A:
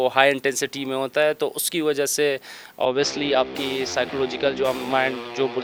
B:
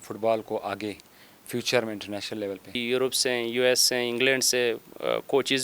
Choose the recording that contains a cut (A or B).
B